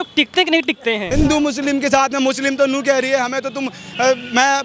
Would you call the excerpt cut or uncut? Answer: cut